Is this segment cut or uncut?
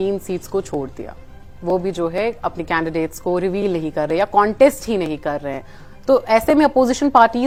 uncut